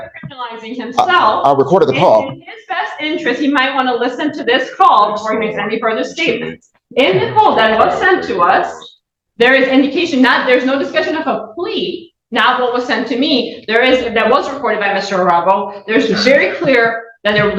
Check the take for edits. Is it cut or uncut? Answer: uncut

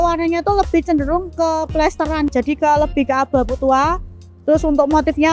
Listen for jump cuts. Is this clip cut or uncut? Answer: cut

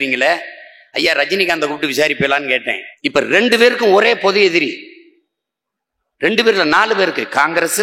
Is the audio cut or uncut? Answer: cut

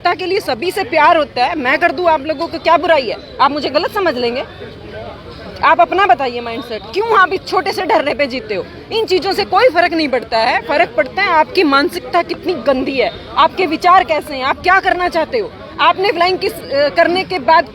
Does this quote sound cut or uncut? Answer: uncut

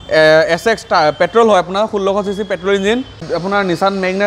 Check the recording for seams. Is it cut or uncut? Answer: cut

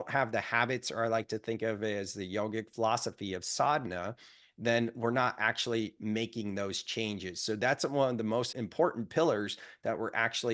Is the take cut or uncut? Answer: cut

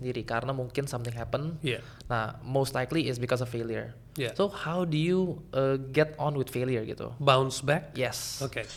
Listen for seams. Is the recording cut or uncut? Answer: uncut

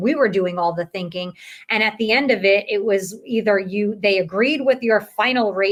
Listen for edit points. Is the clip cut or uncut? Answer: uncut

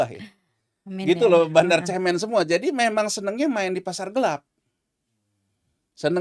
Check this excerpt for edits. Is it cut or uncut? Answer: uncut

